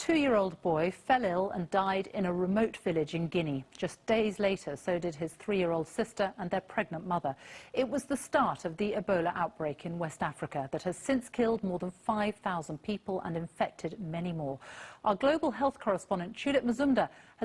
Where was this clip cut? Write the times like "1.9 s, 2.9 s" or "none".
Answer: none